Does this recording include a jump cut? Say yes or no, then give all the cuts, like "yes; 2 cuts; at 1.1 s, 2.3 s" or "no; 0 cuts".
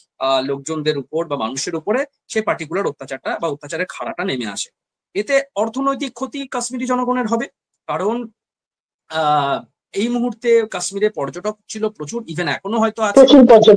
no; 0 cuts